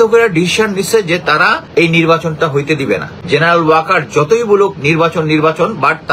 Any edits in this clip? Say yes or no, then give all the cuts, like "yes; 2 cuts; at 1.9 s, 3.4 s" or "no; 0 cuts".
yes; 2 cuts; at 1.6 s, 3.1 s